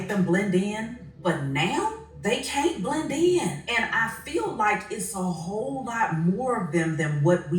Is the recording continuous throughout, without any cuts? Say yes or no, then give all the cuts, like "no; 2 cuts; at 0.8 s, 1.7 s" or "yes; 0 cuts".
no; 3 cuts; at 1.0 s, 2.1 s, 3.6 s